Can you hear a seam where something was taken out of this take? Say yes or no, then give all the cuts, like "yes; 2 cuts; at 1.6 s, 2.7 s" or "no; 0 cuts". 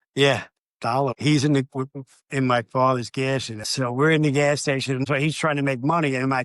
yes; 2 cuts; at 3.6 s, 5.0 s